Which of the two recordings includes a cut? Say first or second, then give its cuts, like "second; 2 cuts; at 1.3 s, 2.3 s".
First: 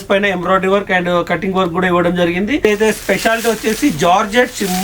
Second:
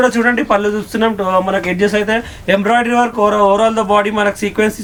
first; 1 cut; at 2.6 s